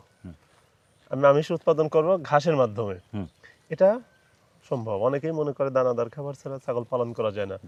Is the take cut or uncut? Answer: uncut